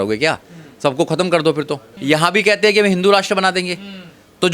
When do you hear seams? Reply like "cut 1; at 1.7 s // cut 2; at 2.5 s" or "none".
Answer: cut 1; at 1.9 s

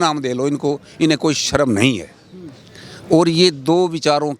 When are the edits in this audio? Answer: none

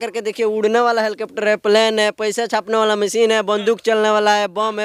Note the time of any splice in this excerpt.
none

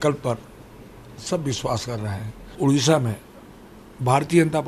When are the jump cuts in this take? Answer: cut 1; at 2.5 s

